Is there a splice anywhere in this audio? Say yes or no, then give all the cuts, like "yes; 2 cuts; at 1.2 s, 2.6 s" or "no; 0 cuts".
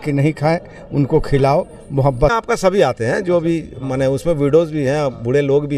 yes; 1 cut; at 2.3 s